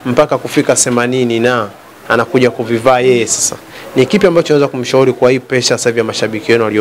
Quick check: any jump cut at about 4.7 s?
no; 0 cuts

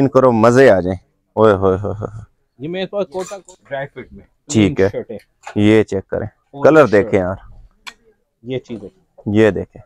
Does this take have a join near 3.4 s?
yes; 1 cut; at 3.4 s

